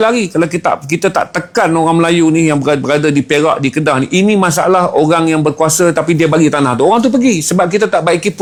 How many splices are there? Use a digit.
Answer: 0